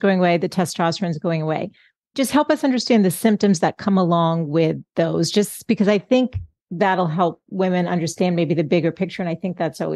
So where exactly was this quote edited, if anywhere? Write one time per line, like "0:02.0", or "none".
0:02.1